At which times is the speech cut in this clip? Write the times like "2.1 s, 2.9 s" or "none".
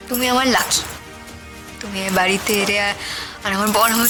none